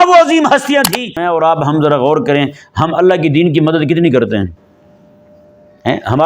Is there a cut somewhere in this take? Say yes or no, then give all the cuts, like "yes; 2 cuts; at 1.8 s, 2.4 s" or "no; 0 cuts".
yes; 1 cut; at 1.2 s